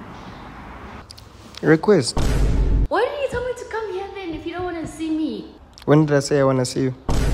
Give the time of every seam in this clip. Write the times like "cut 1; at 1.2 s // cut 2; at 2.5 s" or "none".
cut 1; at 2.8 s

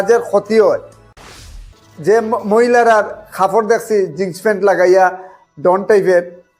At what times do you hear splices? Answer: cut 1; at 1.4 s

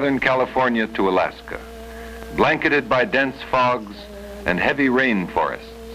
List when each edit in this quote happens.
none

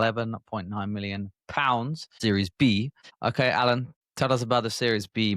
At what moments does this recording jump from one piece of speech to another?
cut 1; at 2.0 s // cut 2; at 3.0 s // cut 3; at 4.0 s

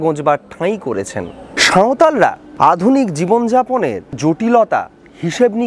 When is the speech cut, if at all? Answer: cut 1; at 1.6 s // cut 2; at 2.4 s // cut 3; at 4.2 s

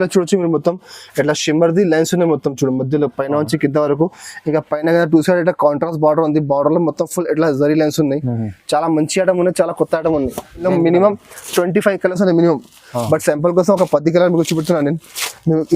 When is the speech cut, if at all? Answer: cut 1; at 10.6 s

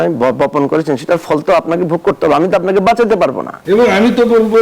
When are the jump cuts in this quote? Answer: cut 1; at 3.5 s

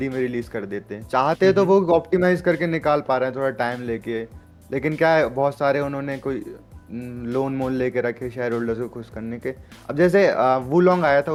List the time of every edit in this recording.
none

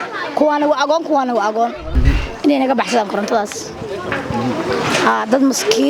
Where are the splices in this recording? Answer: cut 1; at 1.9 s

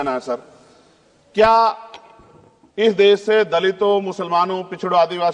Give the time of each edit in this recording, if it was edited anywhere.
none

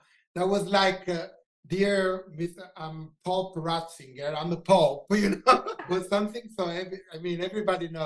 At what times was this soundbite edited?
cut 1; at 5.8 s

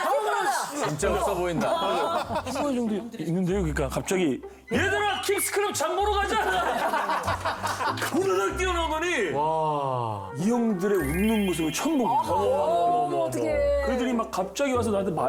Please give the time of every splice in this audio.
none

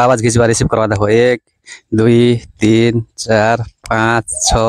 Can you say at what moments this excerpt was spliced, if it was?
none

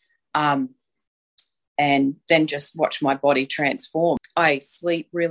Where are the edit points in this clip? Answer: cut 1; at 4.2 s

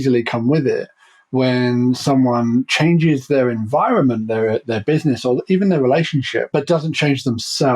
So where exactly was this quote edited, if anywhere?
cut 1; at 6.5 s

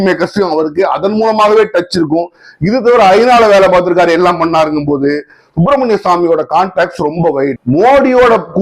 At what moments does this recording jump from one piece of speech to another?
cut 1; at 7.6 s

